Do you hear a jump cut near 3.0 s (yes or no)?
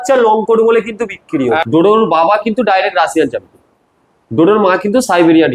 no